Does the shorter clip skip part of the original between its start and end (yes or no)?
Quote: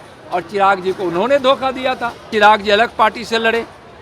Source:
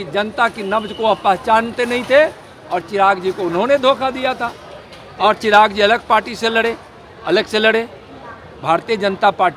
yes